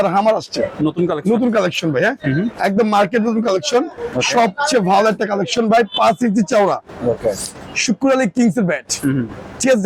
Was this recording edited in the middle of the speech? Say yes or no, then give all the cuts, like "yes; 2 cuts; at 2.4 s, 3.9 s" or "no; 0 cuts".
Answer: no; 0 cuts